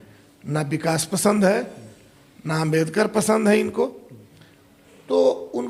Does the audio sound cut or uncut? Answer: uncut